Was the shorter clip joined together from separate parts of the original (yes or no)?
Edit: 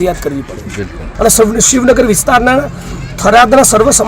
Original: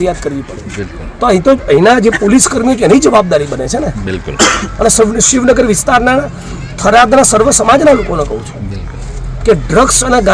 yes